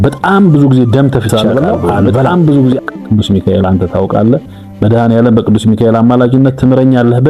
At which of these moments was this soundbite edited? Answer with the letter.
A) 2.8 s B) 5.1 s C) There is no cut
A